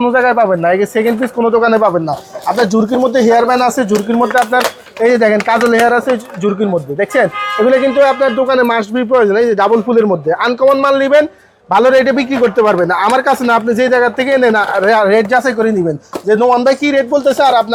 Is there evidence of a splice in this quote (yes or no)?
no